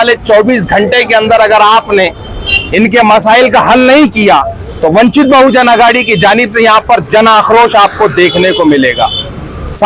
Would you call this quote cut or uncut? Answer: uncut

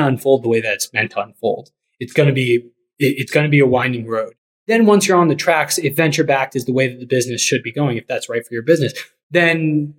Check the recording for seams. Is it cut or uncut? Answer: uncut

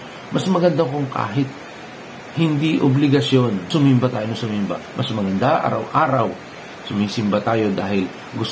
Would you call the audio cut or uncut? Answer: cut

